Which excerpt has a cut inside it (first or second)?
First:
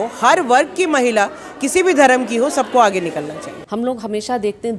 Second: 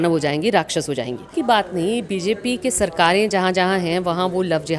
first